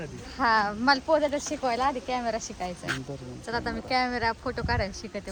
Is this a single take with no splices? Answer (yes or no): yes